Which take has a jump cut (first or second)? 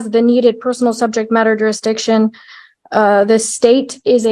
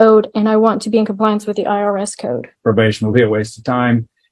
second